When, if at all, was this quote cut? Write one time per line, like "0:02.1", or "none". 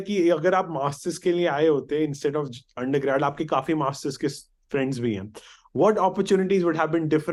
none